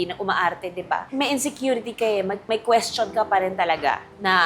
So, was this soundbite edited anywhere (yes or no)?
yes